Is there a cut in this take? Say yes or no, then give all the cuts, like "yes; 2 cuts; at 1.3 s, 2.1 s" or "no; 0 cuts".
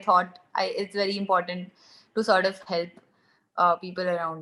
no; 0 cuts